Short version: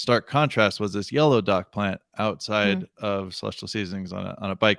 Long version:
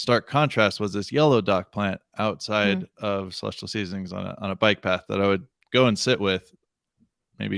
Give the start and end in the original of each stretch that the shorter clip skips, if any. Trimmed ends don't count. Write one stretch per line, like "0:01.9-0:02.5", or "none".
none